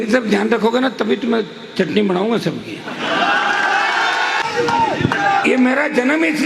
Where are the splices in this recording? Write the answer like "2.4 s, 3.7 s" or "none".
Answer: 4.4 s